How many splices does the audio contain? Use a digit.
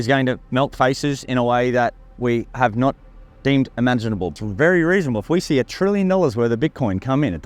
1